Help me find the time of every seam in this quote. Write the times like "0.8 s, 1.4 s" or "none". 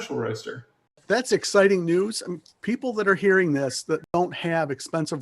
1.0 s, 4.0 s